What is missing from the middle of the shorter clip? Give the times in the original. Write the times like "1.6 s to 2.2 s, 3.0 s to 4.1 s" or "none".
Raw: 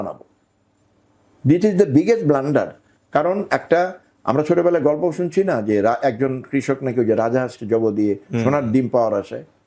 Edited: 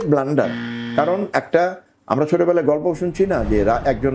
none